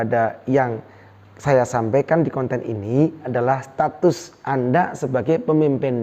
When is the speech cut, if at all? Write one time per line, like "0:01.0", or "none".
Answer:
0:03.3